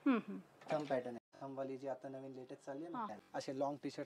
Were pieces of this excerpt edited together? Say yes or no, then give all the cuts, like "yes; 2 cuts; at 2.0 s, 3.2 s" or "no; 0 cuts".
yes; 2 cuts; at 1.2 s, 3.2 s